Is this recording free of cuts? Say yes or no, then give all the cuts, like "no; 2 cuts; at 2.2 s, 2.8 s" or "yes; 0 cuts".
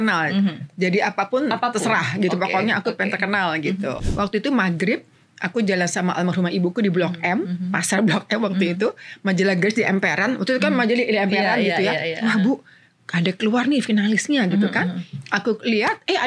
no; 1 cut; at 4.0 s